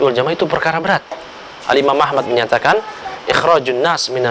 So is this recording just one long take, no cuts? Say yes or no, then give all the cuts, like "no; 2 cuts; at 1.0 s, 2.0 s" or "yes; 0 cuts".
yes; 0 cuts